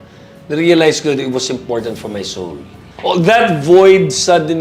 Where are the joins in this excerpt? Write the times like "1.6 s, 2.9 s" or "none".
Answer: 2.8 s